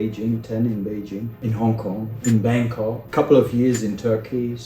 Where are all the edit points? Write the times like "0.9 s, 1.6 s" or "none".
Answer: 1.4 s, 2.1 s, 3.0 s